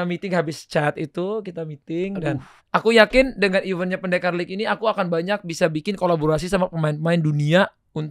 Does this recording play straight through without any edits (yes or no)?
no